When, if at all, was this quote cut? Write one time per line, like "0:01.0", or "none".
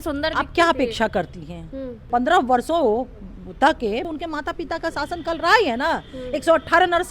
0:01.9
0:04.1